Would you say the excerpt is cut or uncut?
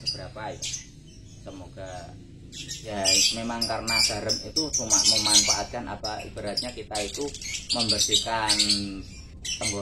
cut